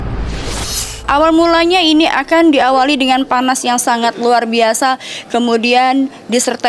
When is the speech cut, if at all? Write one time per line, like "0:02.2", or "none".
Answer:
0:00.9